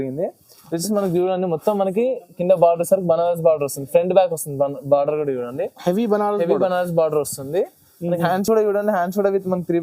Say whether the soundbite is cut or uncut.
uncut